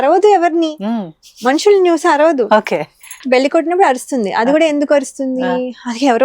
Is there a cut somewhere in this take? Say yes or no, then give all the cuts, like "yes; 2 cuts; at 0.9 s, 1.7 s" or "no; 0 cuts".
yes; 1 cut; at 3.2 s